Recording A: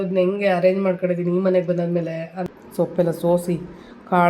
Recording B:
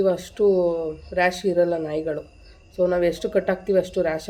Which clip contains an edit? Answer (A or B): A